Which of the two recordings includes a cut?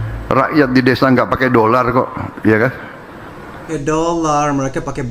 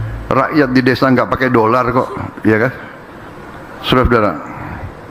first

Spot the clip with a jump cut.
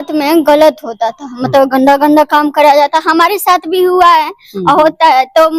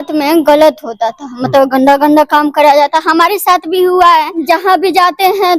second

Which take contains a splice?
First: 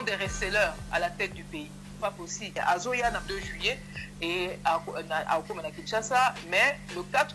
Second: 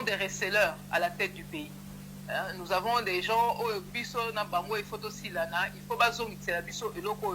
first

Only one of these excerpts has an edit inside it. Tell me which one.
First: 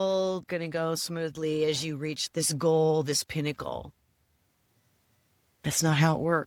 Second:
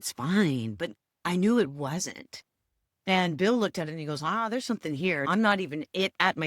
second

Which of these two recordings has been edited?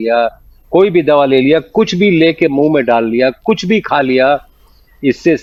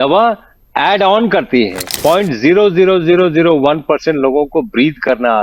second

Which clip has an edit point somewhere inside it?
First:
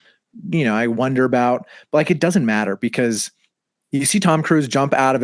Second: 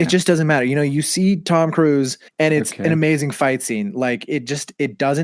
second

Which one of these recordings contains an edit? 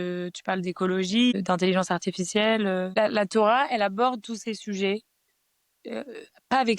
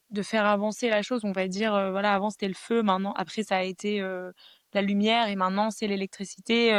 first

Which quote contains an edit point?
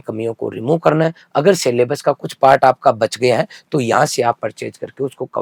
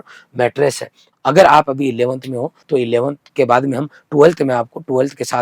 second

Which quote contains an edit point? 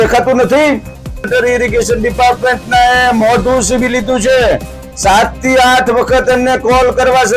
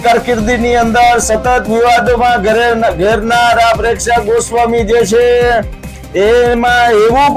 first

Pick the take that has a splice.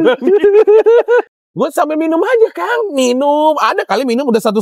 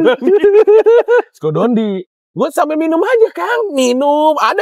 first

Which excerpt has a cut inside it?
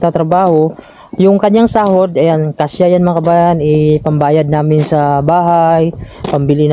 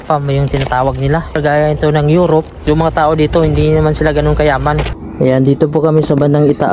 second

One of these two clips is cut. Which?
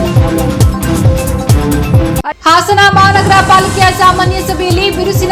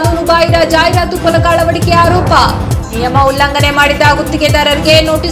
first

